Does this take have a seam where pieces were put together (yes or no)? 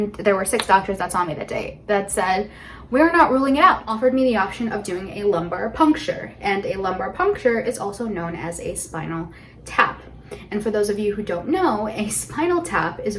yes